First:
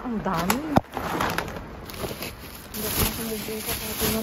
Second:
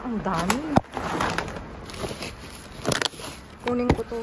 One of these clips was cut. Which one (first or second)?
first